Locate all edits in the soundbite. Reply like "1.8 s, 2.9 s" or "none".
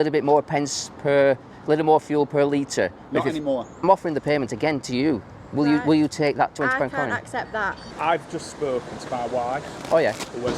3.8 s, 7.8 s

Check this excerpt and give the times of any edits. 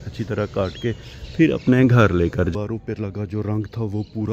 2.5 s

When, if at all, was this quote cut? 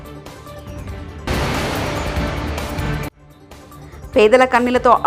none

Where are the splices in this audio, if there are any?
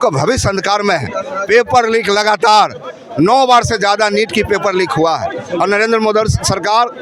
none

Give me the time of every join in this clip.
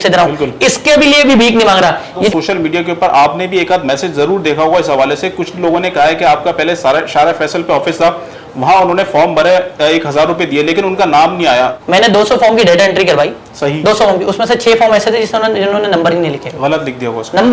2.3 s, 11.8 s

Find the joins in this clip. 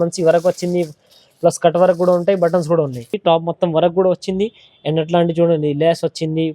3.2 s

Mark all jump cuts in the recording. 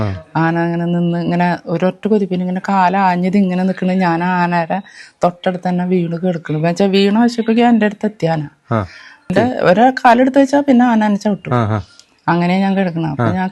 9.3 s

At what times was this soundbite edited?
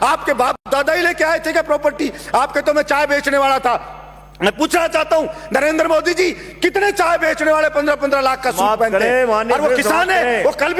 none

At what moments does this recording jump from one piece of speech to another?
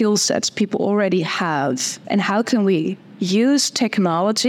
1.9 s

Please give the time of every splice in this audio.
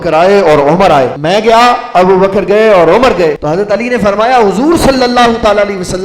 1.2 s, 3.4 s

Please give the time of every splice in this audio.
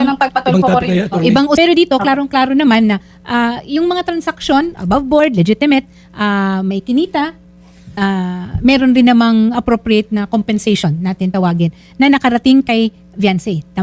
1.5 s

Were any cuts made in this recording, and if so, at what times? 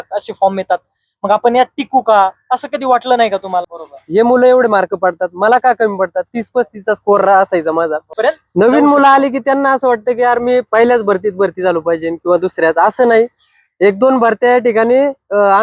3.6 s, 8.1 s

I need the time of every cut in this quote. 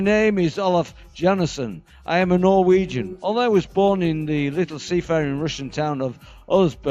none

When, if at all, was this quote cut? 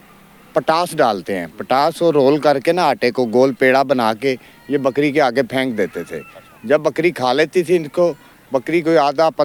none

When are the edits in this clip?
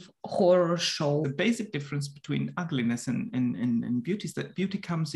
1.2 s

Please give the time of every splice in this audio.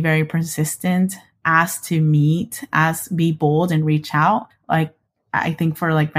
none

